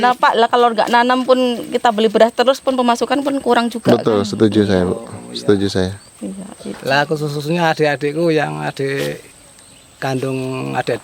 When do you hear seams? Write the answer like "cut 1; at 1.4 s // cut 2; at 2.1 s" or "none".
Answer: cut 1; at 6.8 s